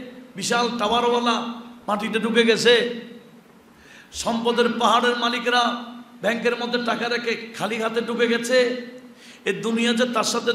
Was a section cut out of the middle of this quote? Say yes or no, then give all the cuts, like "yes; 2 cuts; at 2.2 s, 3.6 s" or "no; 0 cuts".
no; 0 cuts